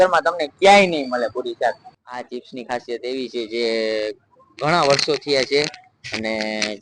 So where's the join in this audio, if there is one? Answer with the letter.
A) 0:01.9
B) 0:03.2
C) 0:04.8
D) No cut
A